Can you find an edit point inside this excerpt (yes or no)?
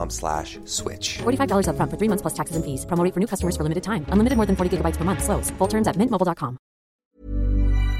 yes